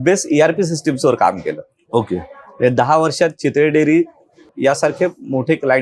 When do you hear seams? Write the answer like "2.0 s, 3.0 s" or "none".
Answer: 4.5 s